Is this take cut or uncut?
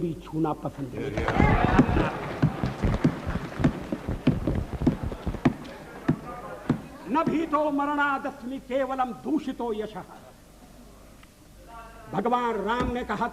uncut